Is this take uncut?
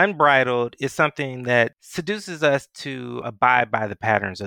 no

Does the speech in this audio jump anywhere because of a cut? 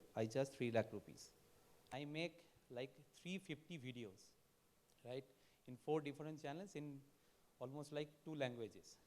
yes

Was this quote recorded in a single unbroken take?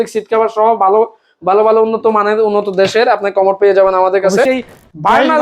no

